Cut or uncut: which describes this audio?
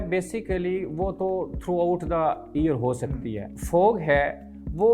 cut